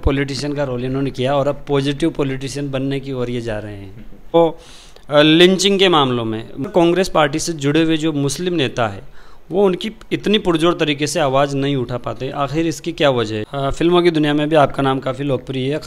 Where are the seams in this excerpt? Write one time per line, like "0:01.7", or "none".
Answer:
0:04.3
0:06.7
0:13.4

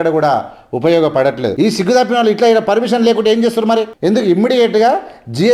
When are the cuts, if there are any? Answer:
0:01.5
0:03.9

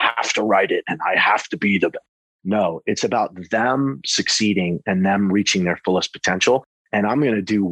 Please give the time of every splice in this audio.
none

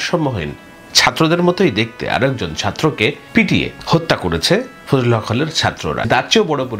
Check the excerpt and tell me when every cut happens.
0:03.5
0:06.1

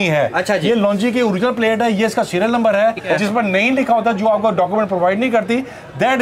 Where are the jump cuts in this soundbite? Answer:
0:03.1

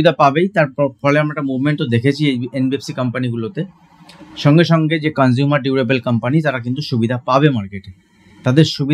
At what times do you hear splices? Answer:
none

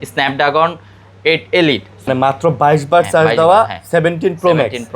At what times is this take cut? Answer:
0:02.1

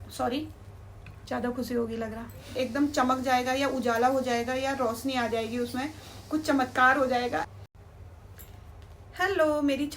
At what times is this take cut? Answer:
0:02.6
0:07.5

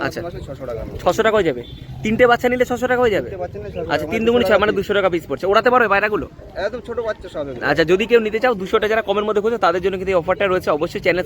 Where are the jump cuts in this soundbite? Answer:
none

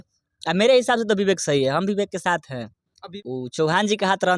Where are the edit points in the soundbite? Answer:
0:03.1

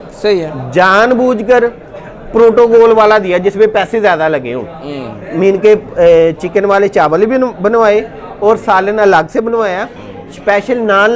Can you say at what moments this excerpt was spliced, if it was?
none

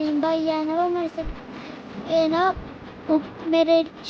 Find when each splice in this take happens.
none

